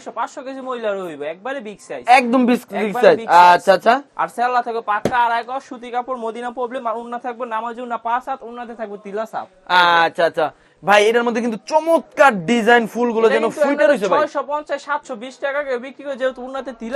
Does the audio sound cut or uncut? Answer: uncut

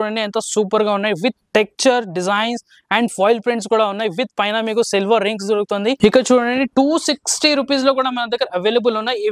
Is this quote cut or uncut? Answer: cut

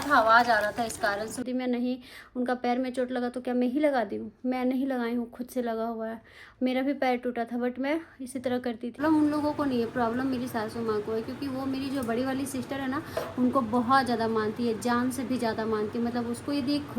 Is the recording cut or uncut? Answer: cut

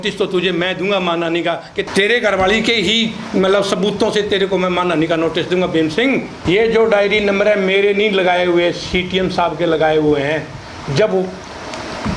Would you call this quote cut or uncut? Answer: cut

